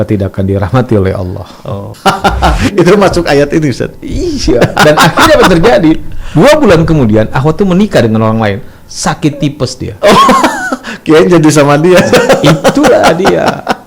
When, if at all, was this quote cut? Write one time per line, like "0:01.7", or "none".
0:01.9